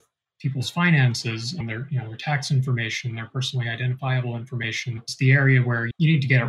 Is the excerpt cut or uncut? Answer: uncut